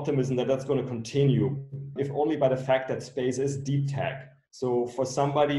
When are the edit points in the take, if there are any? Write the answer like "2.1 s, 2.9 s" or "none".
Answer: 1.9 s